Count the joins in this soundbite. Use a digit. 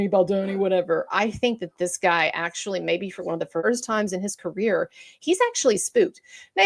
1